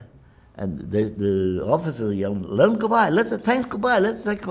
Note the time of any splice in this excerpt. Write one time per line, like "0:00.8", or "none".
none